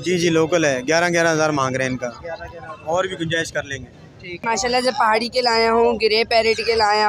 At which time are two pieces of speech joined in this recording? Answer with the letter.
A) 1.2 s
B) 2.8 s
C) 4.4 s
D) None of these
C